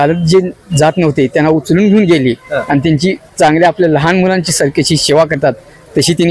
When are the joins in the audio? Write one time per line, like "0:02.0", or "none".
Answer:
none